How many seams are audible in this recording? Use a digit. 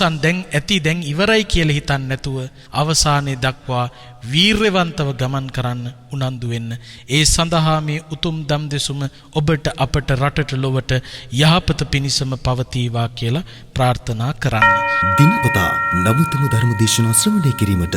2